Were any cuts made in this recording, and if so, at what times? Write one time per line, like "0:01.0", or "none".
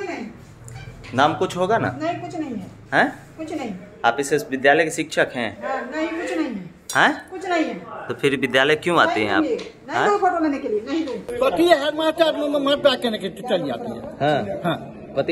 0:11.3